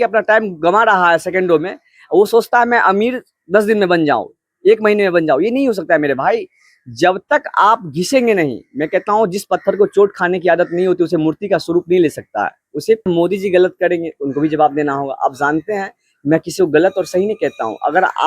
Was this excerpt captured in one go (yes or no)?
no